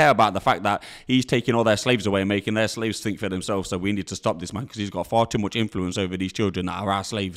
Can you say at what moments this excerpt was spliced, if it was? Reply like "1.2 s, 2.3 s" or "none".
none